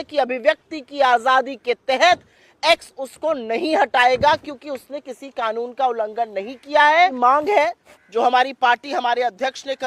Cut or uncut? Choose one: cut